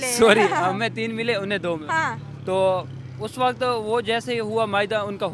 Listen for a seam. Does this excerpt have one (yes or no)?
no